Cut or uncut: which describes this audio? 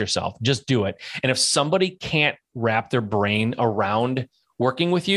uncut